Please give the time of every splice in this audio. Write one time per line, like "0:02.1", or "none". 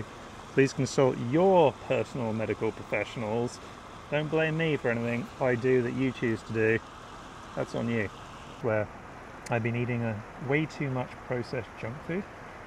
0:08.6